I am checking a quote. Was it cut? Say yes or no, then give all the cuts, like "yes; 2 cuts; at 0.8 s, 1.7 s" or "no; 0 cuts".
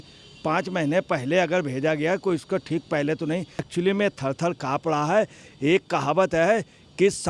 yes; 1 cut; at 3.7 s